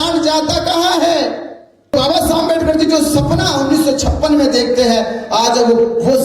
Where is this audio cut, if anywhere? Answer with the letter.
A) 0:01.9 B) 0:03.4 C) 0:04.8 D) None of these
A